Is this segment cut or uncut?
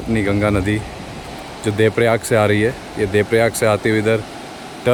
uncut